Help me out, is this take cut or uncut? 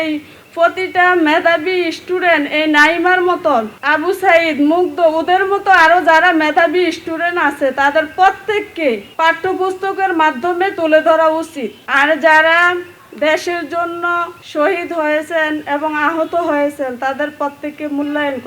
uncut